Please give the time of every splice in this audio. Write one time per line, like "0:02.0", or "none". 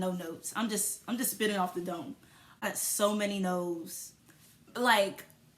0:02.6